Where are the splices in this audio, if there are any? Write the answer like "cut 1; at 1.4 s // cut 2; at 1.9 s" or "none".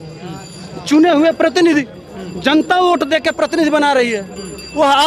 none